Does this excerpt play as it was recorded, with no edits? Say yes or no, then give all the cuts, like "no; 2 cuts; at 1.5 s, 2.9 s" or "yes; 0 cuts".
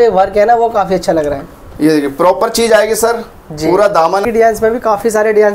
no; 1 cut; at 4.2 s